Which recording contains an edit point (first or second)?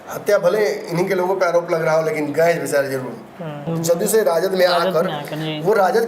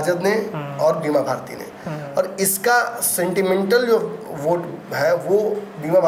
first